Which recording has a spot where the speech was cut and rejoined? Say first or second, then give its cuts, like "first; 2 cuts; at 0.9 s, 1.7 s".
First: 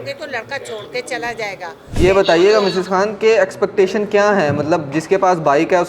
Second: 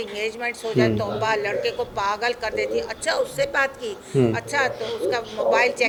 first; 1 cut; at 2.0 s